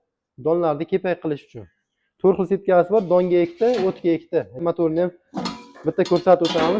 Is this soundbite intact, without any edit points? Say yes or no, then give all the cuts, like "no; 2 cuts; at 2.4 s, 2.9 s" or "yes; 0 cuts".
no; 1 cut; at 4.6 s